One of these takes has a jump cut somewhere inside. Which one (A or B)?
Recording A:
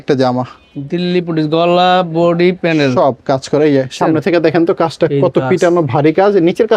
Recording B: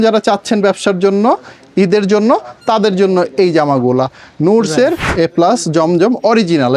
B